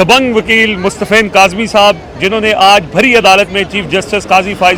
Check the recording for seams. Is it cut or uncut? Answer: uncut